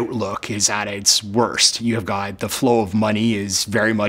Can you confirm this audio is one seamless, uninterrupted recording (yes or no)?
no